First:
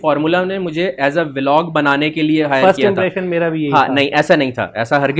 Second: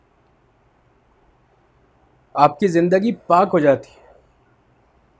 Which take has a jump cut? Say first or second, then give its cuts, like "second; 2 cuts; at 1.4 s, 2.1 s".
second; 1 cut; at 1.3 s